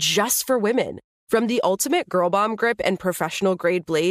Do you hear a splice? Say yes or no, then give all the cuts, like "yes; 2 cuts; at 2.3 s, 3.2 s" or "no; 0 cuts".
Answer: no; 0 cuts